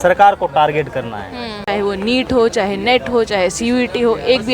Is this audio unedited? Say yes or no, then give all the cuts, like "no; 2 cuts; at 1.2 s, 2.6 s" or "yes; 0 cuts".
no; 1 cut; at 1.5 s